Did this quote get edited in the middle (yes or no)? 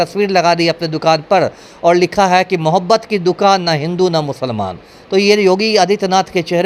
no